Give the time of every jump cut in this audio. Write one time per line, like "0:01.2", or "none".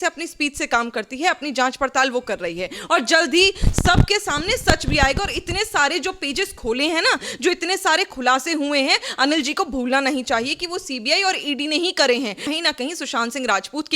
0:12.5